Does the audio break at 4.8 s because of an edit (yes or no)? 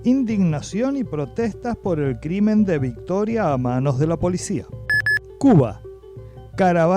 yes